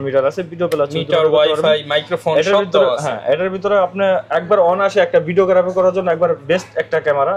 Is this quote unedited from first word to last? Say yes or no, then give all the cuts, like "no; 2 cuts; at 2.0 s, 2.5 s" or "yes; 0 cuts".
yes; 0 cuts